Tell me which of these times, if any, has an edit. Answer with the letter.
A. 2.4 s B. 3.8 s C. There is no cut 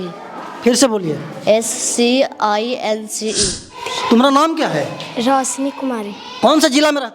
B